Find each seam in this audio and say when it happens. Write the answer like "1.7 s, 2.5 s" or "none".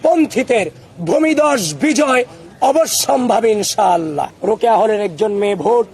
4.3 s